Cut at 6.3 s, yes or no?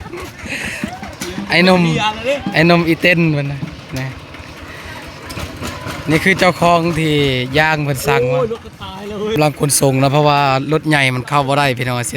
no